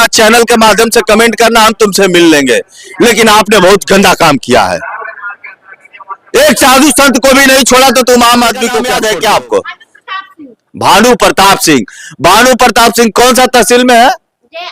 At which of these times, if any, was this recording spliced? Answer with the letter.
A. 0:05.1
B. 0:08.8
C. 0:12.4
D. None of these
B